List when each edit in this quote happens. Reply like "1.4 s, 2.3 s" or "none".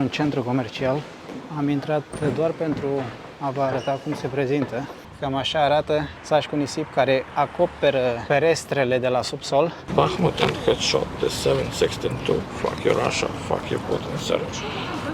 5.1 s, 9.8 s